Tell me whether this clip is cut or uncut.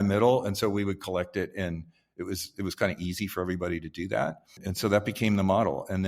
cut